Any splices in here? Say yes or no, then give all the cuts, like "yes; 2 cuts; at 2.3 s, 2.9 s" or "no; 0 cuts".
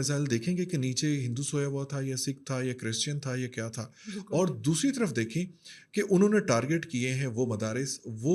no; 0 cuts